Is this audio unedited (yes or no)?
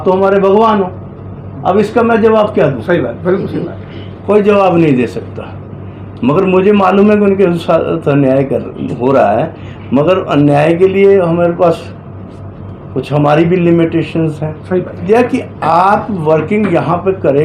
no